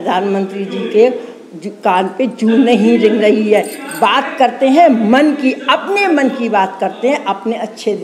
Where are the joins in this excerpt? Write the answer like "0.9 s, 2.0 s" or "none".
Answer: none